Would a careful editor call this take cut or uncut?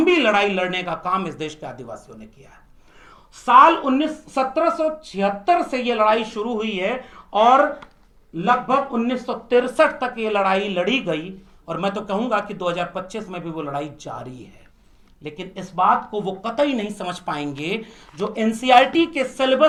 uncut